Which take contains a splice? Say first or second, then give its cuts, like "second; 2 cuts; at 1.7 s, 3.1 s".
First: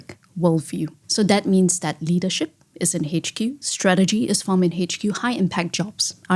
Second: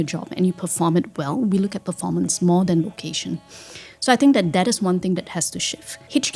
first; 1 cut; at 1.0 s